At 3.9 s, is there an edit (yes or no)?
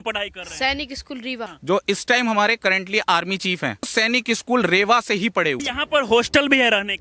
yes